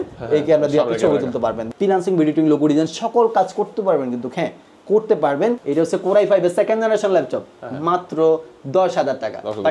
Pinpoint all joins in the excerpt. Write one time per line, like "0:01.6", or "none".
0:01.6
0:05.6